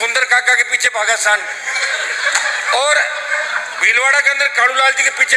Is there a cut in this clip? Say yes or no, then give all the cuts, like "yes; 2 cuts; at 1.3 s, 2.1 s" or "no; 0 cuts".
no; 0 cuts